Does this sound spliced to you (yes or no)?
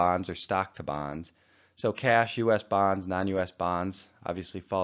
no